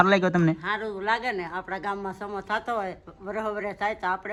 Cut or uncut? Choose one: uncut